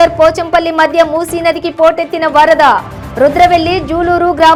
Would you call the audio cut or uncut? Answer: uncut